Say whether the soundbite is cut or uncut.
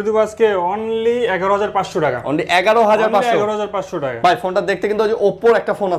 uncut